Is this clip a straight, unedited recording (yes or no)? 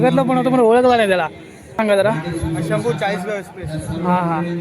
no